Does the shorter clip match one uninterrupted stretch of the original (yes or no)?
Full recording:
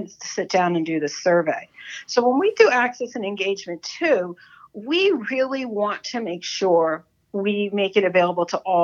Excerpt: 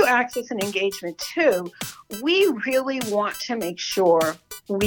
yes